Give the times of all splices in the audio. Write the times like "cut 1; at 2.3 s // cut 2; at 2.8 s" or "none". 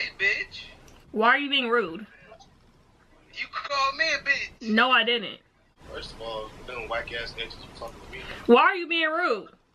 cut 1; at 5.7 s // cut 2; at 8.5 s